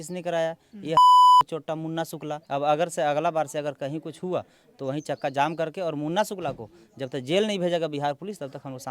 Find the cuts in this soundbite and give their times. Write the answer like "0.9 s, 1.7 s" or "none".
2.4 s